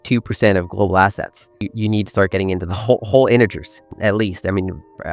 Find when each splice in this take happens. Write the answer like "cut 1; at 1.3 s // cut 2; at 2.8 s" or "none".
cut 1; at 1.6 s // cut 2; at 3.9 s